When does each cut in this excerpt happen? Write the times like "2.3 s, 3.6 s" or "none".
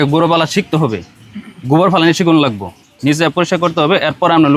none